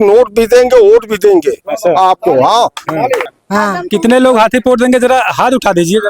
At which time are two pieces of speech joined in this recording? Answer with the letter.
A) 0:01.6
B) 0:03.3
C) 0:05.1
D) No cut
B